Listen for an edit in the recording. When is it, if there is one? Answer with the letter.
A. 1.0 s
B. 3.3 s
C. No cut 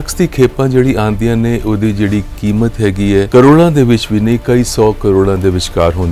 B